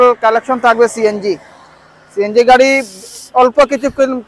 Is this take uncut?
yes; 0 cuts

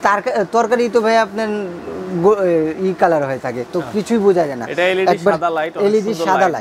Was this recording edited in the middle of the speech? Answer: no; 0 cuts

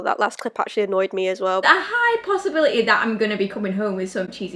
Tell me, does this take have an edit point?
yes; 1 cut; at 1.6 s

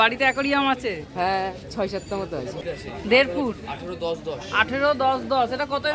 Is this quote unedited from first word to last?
no; 1 cut; at 2.6 s

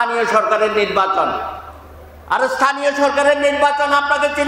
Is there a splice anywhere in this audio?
no; 0 cuts

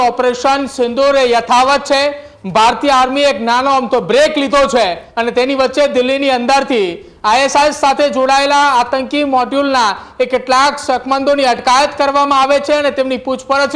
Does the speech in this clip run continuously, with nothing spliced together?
no; 1 cut; at 5.0 s

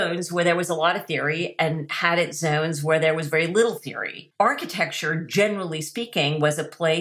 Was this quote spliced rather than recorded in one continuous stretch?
no; 0 cuts

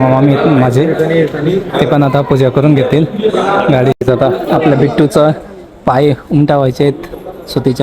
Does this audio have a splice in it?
yes; 1 cut; at 4.0 s

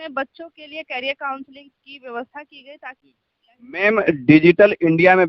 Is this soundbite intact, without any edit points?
no; 1 cut; at 3.2 s

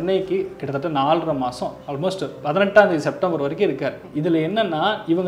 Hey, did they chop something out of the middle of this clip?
yes; 1 cut; at 4.0 s

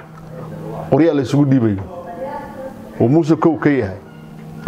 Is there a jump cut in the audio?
no; 0 cuts

